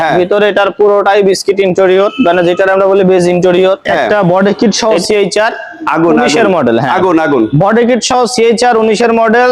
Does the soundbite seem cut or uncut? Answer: cut